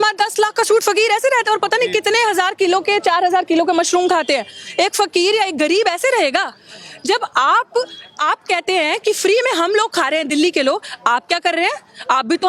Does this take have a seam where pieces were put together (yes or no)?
no